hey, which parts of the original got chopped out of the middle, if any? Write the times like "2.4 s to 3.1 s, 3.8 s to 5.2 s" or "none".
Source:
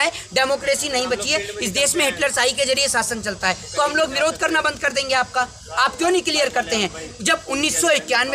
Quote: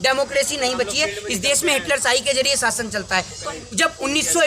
3.7 s to 6.9 s